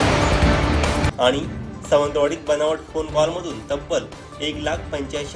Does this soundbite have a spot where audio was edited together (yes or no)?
no